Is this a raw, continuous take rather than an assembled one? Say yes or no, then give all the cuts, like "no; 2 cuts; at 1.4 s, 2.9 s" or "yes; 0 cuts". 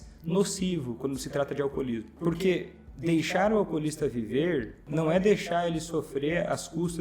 no; 2 cuts; at 2.1 s, 4.8 s